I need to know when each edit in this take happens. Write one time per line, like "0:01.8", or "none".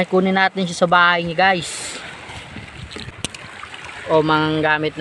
0:03.1